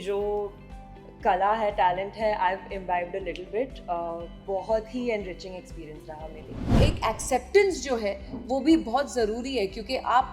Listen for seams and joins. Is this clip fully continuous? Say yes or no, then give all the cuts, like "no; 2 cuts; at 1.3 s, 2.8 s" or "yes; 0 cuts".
no; 1 cut; at 6.8 s